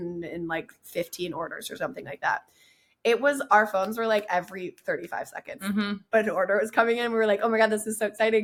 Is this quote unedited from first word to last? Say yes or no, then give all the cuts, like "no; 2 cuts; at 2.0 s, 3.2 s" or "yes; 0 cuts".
yes; 0 cuts